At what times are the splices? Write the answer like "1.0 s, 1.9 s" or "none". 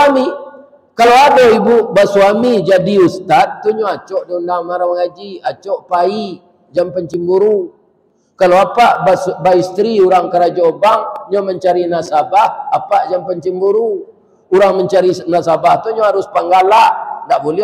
none